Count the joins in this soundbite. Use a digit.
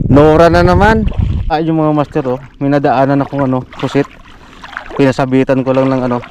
1